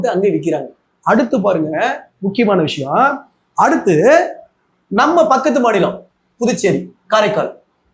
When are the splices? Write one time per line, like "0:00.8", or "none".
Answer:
none